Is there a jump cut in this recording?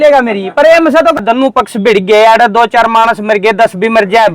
yes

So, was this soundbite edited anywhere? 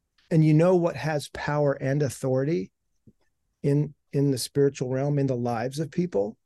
no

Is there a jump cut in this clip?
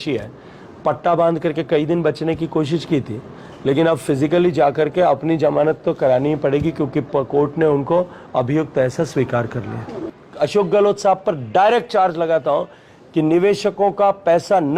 yes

